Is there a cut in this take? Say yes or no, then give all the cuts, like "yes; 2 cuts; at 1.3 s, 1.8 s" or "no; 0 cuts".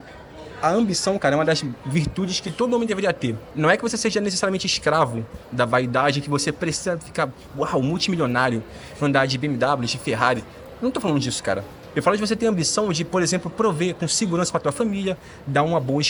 no; 0 cuts